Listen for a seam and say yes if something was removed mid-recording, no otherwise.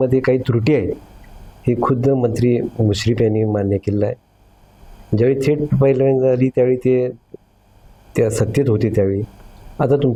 no